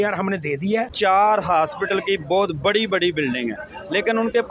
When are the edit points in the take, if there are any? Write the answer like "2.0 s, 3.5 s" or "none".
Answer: 0.9 s